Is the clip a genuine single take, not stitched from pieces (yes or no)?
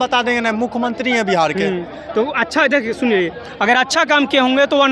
yes